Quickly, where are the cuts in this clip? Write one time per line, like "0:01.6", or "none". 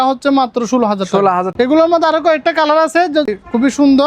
0:01.5
0:03.3